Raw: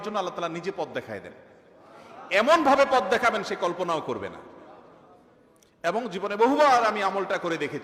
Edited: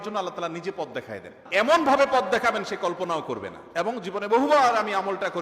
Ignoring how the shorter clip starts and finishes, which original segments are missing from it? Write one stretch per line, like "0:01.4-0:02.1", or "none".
0:01.3-0:02.1
0:04.4-0:05.6